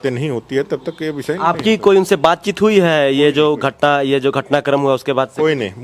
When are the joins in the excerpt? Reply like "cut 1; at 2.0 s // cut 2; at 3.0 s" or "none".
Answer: none

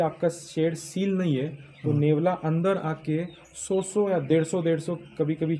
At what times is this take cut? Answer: none

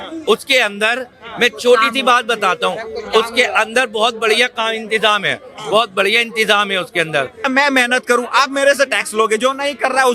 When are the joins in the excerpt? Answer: cut 1; at 7.4 s

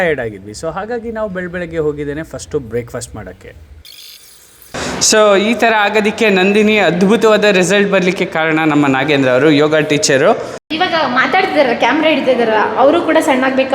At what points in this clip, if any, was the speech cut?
cut 1; at 4.6 s // cut 2; at 10.7 s

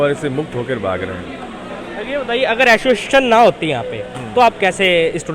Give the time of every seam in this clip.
cut 1; at 1.7 s

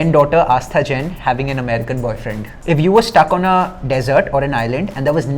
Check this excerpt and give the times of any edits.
cut 1; at 2.6 s

